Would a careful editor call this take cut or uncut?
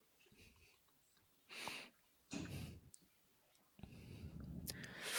uncut